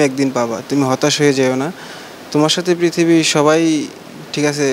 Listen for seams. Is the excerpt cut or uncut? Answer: uncut